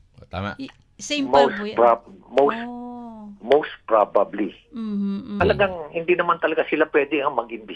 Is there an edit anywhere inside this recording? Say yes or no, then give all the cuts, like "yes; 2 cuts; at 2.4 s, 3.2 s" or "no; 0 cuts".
yes; 1 cut; at 5.4 s